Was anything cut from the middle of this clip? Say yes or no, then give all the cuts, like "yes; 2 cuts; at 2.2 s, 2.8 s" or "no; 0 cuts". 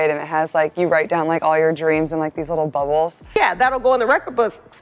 yes; 1 cut; at 3.2 s